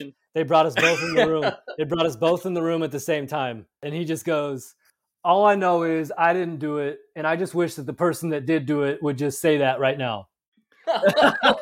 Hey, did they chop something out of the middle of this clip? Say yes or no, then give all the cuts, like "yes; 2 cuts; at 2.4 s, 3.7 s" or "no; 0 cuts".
yes; 1 cut; at 3.9 s